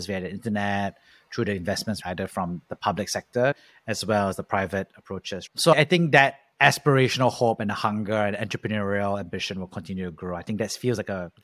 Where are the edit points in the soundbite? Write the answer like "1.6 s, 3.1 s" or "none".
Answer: 2.0 s, 3.6 s